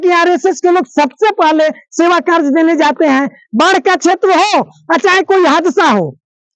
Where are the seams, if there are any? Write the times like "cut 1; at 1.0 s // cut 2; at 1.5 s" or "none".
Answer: none